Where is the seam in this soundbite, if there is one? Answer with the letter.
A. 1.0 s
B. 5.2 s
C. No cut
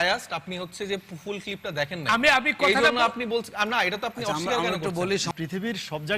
B